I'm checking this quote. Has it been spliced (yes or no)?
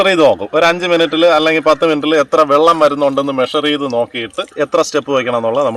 yes